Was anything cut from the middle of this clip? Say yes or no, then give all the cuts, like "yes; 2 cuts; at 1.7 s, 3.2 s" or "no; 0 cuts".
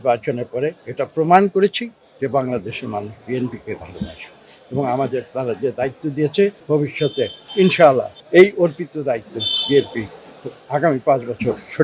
yes; 2 cuts; at 6.6 s, 8.1 s